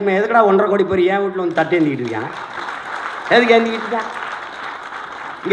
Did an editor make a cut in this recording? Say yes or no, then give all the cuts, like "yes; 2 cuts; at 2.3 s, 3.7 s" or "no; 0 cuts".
no; 0 cuts